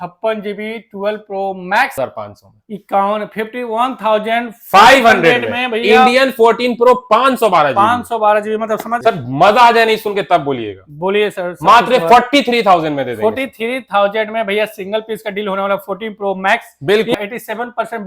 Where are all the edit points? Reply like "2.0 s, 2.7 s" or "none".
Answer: 2.0 s, 8.9 s, 17.1 s